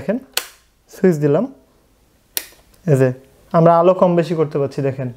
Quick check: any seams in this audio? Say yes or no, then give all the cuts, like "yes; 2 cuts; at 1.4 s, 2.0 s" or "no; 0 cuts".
no; 0 cuts